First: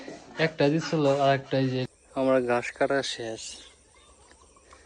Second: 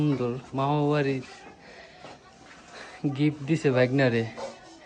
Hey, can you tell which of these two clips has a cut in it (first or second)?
first